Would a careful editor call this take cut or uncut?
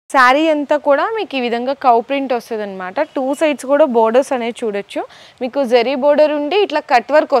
uncut